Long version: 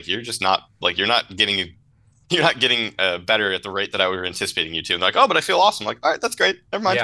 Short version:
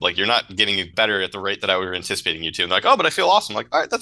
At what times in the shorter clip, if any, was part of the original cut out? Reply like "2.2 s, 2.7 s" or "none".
0.9 s